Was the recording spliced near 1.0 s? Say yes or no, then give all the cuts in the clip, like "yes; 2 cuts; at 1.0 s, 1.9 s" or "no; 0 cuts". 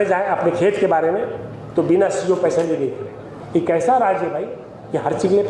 no; 1 cut; at 3.3 s